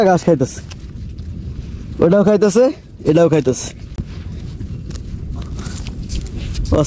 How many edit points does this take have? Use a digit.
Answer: 0